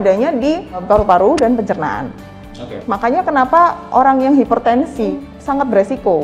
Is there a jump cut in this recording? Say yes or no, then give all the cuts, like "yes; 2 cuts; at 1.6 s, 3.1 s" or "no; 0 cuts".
yes; 3 cuts; at 0.8 s, 2.8 s, 5.2 s